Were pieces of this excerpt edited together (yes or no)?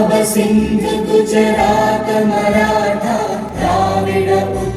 no